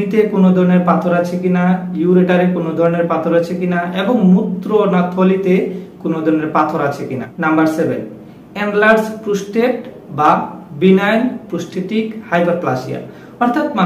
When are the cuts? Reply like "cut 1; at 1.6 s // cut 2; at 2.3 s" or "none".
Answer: none